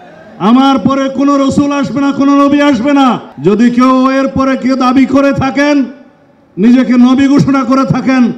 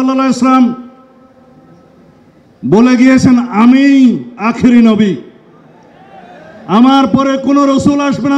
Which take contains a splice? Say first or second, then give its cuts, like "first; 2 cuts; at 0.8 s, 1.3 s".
first; 1 cut; at 3.3 s